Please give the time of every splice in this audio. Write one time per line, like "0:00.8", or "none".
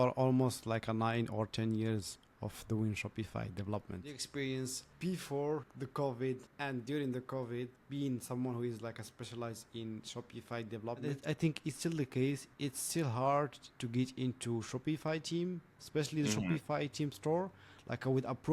0:04.2
0:11.0